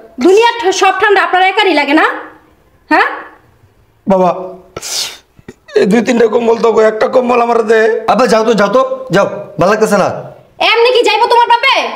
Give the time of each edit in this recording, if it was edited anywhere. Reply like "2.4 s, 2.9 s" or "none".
8.0 s

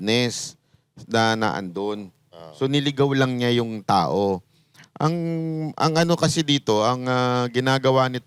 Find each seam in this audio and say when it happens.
none

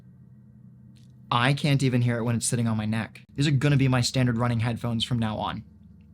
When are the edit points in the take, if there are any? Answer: 3.2 s

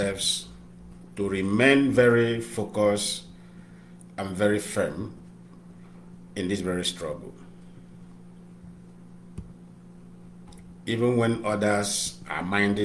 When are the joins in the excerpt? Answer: none

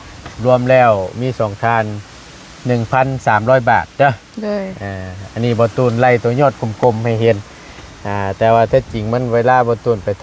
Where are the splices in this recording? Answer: none

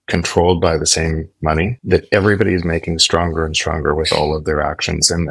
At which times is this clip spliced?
none

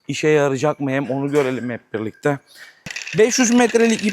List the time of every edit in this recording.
3.0 s

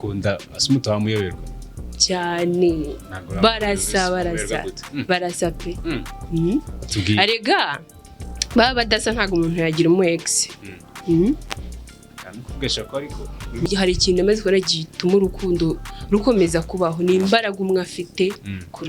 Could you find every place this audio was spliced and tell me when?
13.6 s

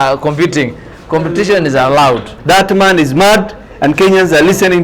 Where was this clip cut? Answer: 2.3 s

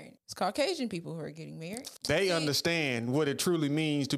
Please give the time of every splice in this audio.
1.9 s

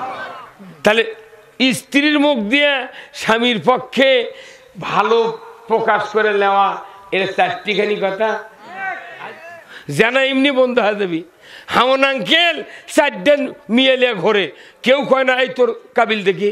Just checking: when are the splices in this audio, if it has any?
9.0 s

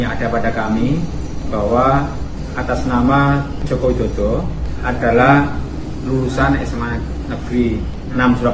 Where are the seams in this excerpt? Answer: none

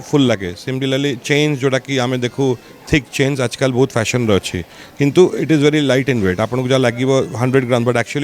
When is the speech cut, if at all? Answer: none

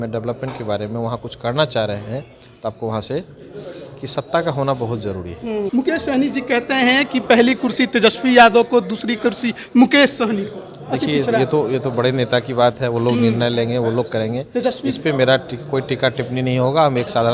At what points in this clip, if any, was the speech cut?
5.7 s

